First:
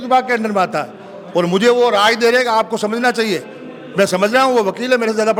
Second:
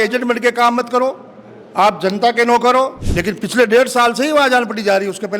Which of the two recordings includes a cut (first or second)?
second